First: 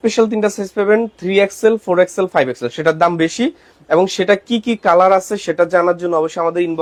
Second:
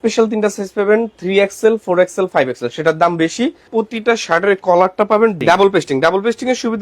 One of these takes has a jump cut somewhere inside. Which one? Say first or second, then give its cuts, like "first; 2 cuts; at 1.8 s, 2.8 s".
second; 2 cuts; at 3.6 s, 5.4 s